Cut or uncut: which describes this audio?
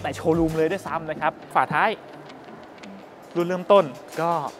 cut